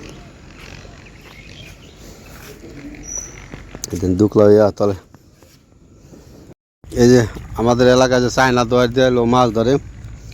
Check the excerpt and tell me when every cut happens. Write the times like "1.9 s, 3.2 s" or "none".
6.5 s